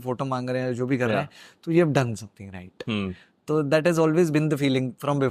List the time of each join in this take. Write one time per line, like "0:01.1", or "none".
none